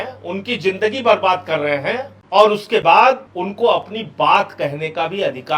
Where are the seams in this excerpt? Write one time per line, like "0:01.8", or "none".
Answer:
0:02.1
0:03.3